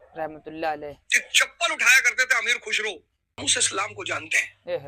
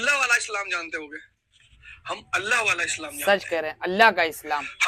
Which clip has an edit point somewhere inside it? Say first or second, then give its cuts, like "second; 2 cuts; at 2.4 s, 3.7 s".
first; 1 cut; at 3.4 s